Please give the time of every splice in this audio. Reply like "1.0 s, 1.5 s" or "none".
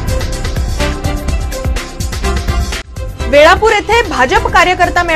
3.2 s